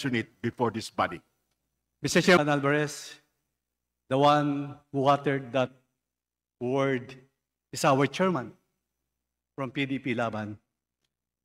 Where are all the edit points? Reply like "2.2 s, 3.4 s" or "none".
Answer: 2.4 s

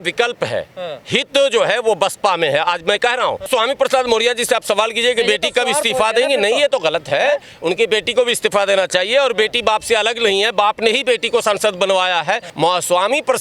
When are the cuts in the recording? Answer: 3.5 s, 12.5 s

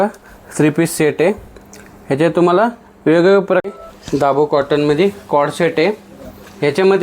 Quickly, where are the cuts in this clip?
3.6 s

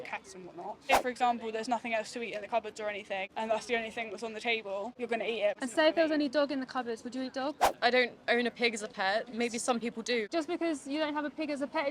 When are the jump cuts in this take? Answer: 0.9 s, 3.3 s, 5.4 s, 7.7 s, 10.3 s

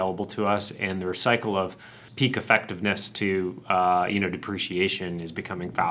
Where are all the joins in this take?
2.0 s

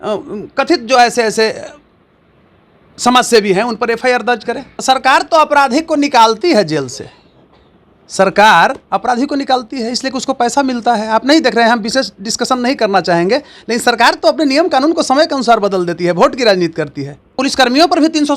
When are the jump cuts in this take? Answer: 4.7 s, 17.3 s

